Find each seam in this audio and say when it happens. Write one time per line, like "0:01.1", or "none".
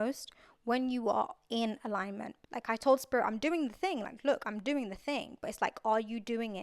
0:02.3